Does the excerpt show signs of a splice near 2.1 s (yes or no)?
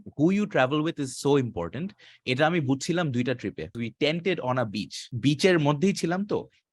no